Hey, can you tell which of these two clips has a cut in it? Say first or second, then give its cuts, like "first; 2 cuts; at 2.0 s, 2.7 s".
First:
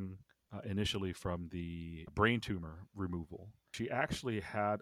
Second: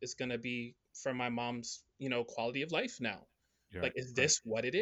first; 2 cuts; at 2.0 s, 3.7 s